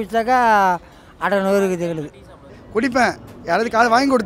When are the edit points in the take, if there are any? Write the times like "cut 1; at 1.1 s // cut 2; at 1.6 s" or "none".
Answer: cut 1; at 2.6 s

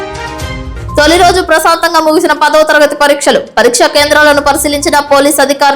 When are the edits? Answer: cut 1; at 1.0 s

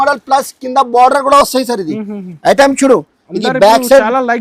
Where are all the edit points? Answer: none

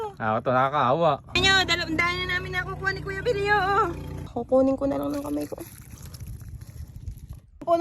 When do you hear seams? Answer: cut 1; at 1.4 s // cut 2; at 4.2 s

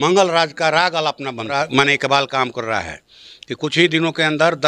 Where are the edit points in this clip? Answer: cut 1; at 1.5 s

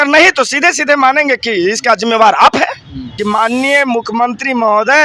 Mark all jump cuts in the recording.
cut 1; at 3.1 s

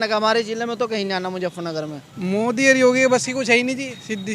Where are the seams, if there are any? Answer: cut 1; at 2.0 s

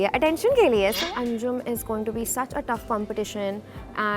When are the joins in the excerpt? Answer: cut 1; at 1.0 s

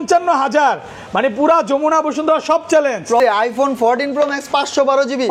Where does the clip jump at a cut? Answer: cut 1; at 3.2 s

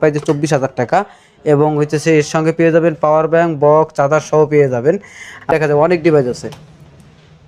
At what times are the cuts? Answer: cut 1; at 5.5 s

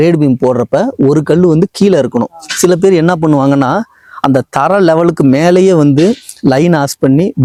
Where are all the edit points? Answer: none

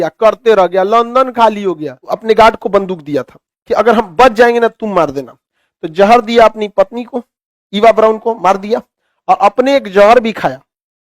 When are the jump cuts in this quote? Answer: cut 1; at 1.9 s

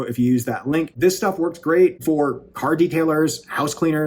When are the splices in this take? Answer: cut 1; at 0.9 s // cut 2; at 2.0 s

